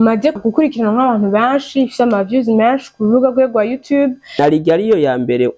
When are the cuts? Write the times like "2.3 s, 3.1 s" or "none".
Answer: 4.4 s